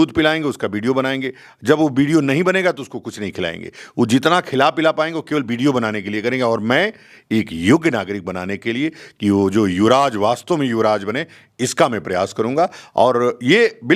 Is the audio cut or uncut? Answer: uncut